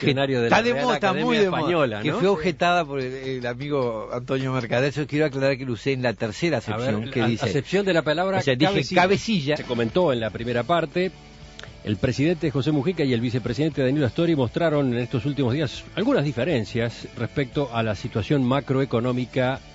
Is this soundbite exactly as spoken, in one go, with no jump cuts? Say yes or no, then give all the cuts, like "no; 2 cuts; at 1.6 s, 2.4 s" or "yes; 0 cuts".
yes; 0 cuts